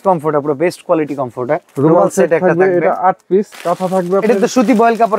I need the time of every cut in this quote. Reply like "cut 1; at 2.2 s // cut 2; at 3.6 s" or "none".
cut 1; at 1.7 s // cut 2; at 3.5 s